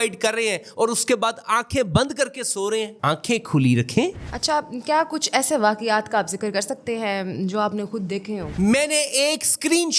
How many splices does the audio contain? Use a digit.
2